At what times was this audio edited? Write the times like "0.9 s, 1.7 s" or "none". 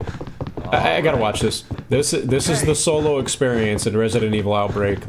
1.7 s